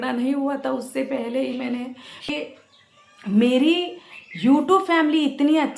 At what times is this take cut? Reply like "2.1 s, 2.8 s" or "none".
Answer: 2.3 s